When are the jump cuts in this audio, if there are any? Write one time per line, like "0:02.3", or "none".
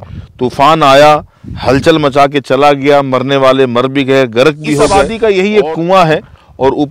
0:05.0